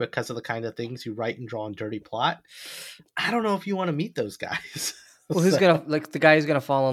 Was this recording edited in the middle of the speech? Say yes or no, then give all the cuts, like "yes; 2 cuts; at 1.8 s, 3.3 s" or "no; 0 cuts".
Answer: no; 0 cuts